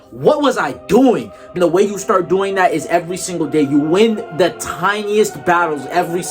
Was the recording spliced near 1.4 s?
yes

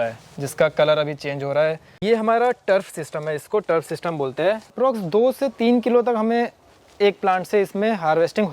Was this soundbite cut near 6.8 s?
no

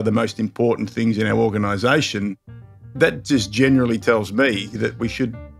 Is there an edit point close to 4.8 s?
yes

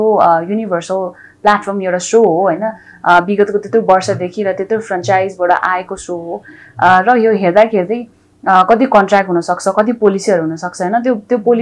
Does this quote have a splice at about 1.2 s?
no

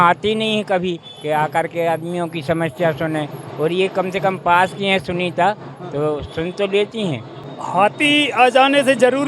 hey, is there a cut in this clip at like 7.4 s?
yes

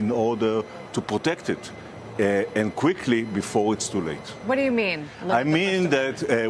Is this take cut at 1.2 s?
yes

